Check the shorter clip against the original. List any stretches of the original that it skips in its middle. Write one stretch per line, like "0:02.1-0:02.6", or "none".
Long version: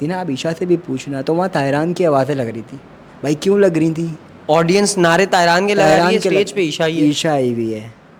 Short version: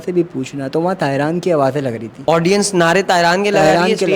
0:02.6-0:04.3